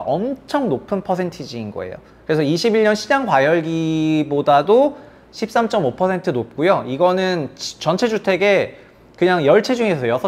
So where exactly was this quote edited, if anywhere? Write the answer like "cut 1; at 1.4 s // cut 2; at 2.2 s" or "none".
none